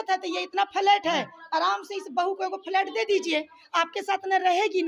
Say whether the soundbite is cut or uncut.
uncut